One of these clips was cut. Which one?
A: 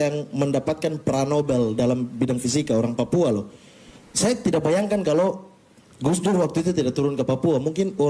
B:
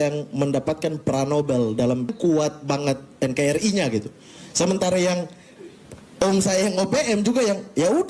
B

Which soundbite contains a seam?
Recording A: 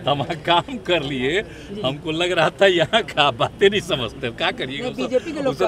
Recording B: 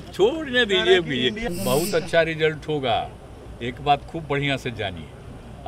B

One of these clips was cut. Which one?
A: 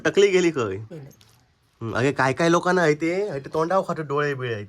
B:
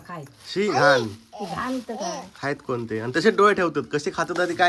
A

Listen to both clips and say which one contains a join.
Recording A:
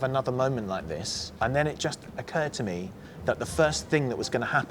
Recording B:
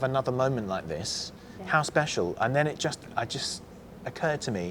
A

